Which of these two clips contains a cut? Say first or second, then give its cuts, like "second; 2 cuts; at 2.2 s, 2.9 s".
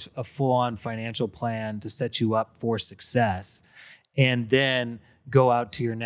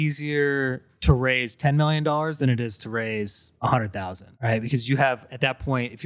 second; 2 cuts; at 3.4 s, 4.2 s